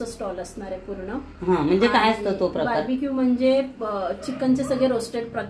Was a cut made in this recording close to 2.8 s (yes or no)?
no